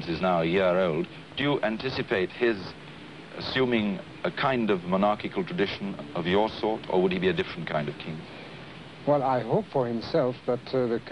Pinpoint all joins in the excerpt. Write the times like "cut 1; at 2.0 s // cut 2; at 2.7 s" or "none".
cut 1; at 6.8 s